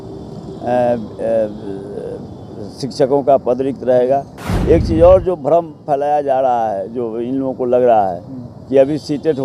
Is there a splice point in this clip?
no; 0 cuts

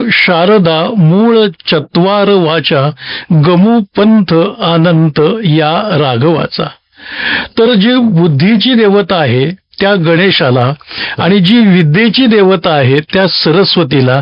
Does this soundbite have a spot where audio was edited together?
no; 0 cuts

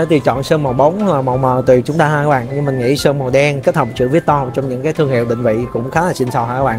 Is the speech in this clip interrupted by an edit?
no; 0 cuts

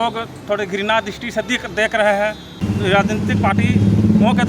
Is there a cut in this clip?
yes; 1 cut; at 2.6 s

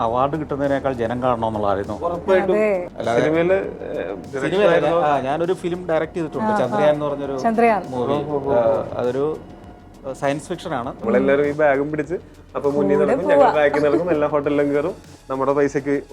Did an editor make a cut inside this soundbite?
yes; 2 cuts; at 2.9 s, 11.0 s

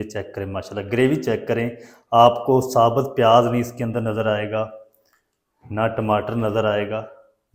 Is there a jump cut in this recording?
no; 0 cuts

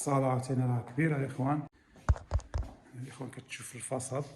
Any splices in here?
yes; 1 cut; at 1.7 s

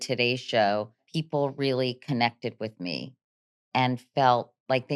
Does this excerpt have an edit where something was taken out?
yes; 1 cut; at 1.1 s

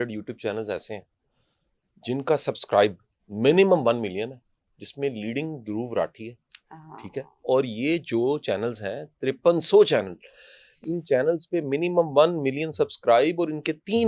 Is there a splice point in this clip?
no; 0 cuts

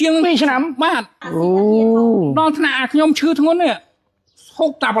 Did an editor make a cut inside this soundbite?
yes; 1 cut; at 1.2 s

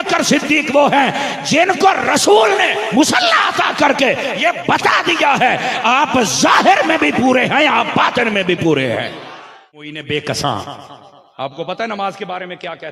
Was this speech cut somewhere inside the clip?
yes; 1 cut; at 9.9 s

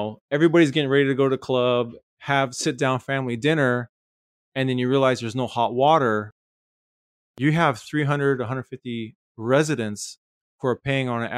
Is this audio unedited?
yes; 0 cuts

